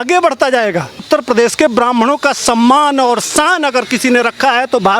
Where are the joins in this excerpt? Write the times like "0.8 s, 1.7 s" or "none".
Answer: 1.0 s

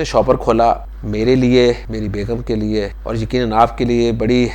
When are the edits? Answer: 1.0 s, 1.9 s, 3.0 s

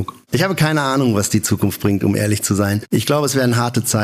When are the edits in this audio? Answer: none

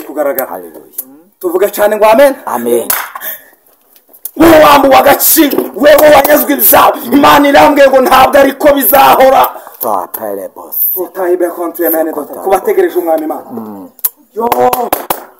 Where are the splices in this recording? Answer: 3.0 s

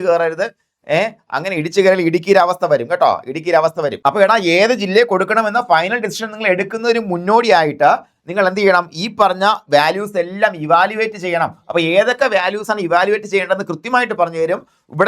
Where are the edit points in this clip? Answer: 3.9 s

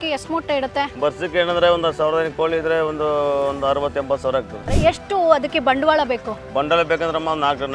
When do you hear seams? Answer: 4.6 s

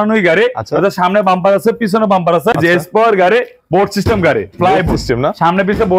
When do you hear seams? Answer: 2.5 s

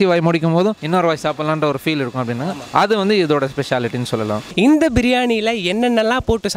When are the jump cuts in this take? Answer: 4.5 s

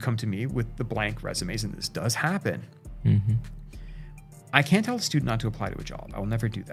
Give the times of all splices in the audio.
none

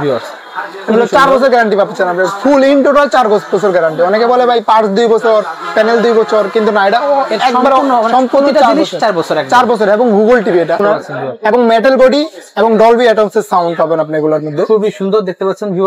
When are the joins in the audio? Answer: 10.8 s

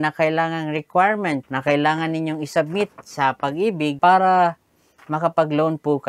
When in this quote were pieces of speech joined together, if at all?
1.5 s, 3.9 s

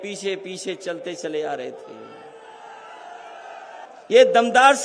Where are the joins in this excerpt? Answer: 3.8 s

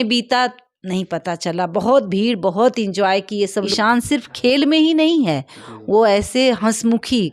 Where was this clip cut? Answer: 3.7 s

